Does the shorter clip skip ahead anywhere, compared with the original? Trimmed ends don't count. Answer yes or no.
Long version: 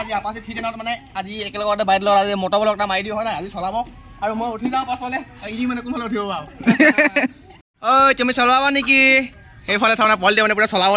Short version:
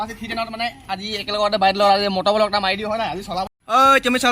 yes